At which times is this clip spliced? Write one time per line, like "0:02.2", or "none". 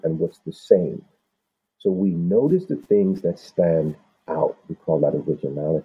0:01.6